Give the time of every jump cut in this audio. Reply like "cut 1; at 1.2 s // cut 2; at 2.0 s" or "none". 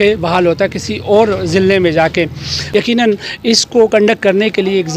none